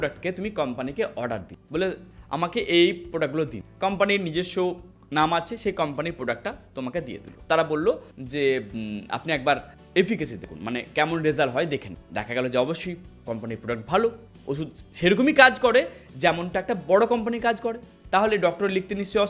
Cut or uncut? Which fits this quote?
uncut